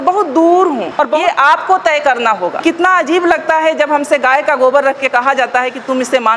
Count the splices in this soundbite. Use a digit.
1